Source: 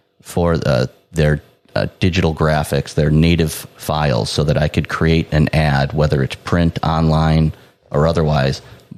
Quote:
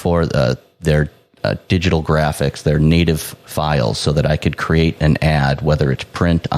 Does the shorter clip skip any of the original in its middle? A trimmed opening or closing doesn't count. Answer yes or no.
no